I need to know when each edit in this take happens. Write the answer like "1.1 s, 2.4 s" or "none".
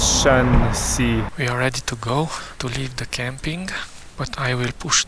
1.3 s, 2.5 s